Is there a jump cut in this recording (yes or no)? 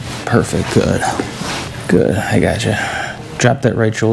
yes